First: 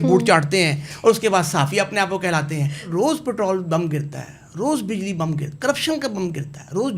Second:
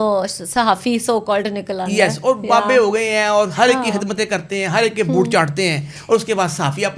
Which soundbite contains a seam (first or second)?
first